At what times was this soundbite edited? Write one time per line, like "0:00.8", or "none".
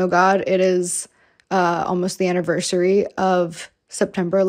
none